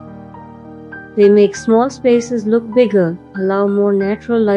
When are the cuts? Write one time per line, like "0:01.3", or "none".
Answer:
0:01.1